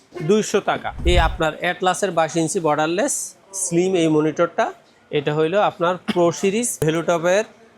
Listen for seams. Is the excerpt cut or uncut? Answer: cut